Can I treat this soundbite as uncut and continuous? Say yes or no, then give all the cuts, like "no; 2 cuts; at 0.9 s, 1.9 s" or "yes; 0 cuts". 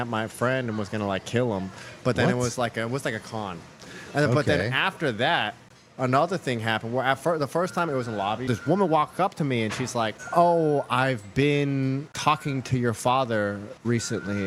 yes; 0 cuts